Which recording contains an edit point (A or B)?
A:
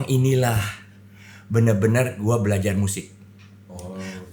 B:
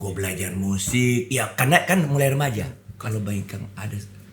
B